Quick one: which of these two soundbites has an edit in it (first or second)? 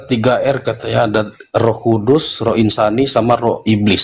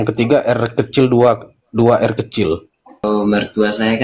second